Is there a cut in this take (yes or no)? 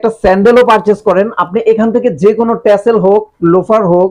no